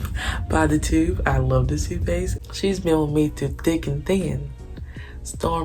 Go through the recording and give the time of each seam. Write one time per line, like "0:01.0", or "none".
0:02.4